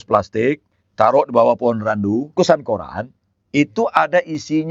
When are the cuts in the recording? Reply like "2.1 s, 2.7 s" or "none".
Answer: 2.3 s